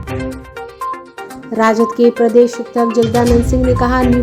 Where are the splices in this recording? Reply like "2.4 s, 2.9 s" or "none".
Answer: 0.9 s